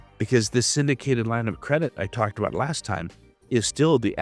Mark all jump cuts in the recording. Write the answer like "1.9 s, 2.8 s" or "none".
none